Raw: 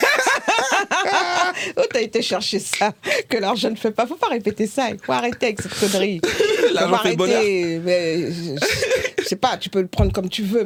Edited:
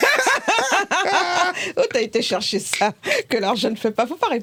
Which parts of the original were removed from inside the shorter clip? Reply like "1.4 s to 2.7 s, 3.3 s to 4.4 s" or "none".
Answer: none